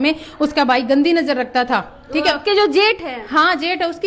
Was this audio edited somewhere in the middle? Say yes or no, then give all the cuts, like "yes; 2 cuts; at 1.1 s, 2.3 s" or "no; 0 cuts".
no; 0 cuts